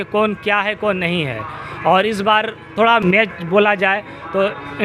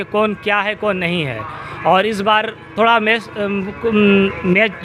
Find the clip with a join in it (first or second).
first